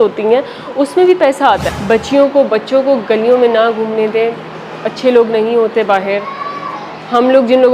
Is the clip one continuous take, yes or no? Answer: no